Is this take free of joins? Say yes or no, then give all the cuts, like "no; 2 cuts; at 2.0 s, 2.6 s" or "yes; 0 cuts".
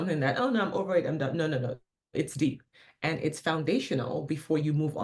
yes; 0 cuts